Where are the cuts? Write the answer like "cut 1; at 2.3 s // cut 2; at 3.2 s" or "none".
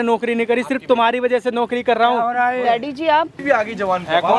cut 1; at 3.4 s